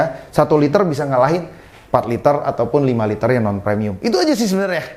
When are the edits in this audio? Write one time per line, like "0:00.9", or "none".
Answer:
none